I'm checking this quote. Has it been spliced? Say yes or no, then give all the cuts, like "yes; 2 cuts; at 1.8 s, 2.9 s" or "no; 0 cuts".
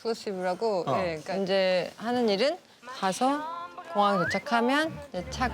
yes; 1 cut; at 1.2 s